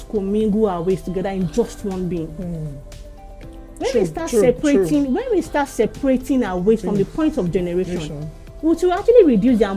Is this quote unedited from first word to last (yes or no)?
yes